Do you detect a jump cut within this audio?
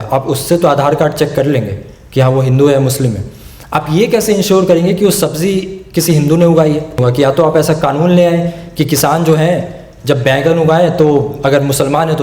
yes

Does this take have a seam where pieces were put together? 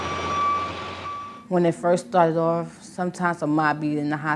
no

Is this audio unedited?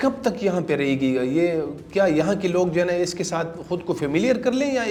yes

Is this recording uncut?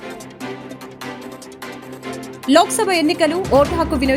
yes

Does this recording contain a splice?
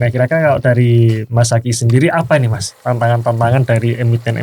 no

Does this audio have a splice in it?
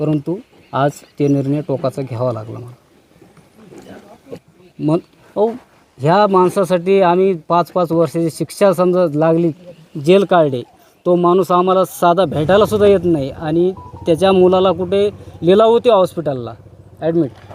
no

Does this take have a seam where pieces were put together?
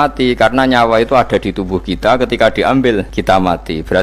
yes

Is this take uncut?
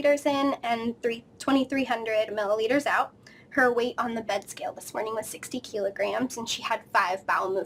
yes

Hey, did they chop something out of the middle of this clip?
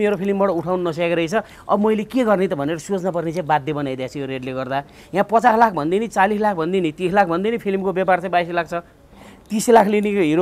no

